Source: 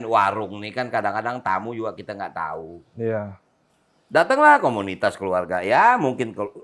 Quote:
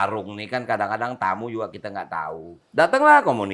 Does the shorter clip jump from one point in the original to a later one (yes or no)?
yes